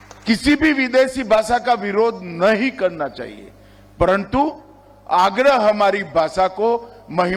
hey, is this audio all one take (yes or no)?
yes